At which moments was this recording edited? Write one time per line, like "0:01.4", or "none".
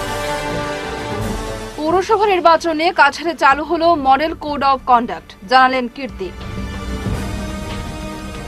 0:01.3